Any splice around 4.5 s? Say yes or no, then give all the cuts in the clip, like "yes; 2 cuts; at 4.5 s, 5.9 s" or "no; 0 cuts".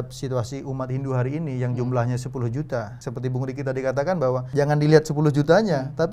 yes; 2 cuts; at 3.0 s, 4.5 s